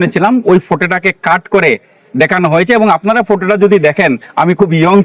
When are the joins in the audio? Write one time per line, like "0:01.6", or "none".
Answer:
none